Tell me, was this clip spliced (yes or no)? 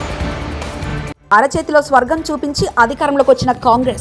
yes